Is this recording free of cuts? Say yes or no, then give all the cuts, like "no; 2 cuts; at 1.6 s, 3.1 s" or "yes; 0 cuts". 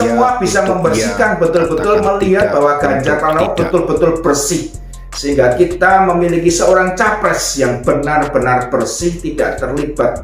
yes; 0 cuts